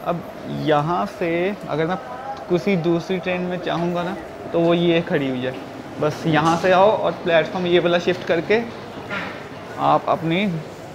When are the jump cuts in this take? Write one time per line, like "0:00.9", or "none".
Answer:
none